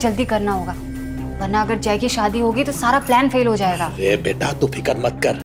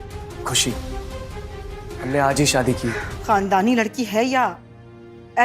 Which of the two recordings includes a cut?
second; 1 cut; at 3.1 s

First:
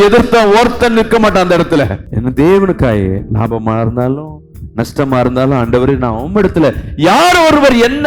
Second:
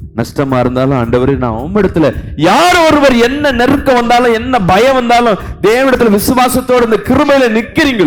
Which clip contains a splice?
first; 1 cut; at 2.0 s

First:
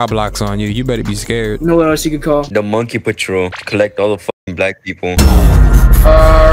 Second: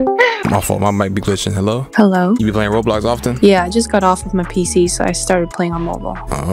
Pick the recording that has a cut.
second; 1 cut; at 2.4 s

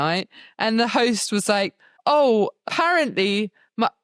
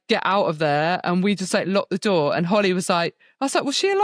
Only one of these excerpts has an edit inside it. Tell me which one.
first; 2 cuts; at 1.8 s, 2.7 s

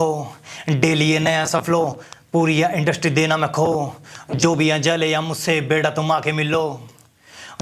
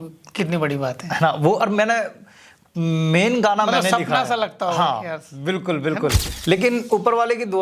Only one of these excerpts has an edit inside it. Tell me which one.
second; 1 cut; at 6.3 s

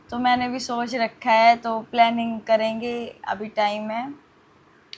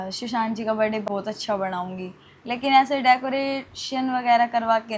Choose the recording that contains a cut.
second; 1 cut; at 1.1 s

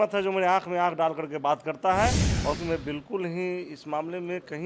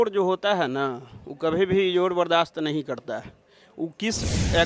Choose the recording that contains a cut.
first; 1 cut; at 2.6 s

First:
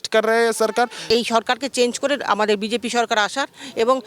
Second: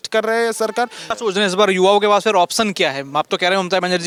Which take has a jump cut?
first; 1 cut; at 1.0 s

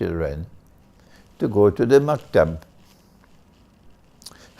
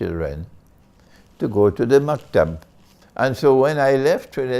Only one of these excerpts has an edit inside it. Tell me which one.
second; 1 cut; at 3.0 s

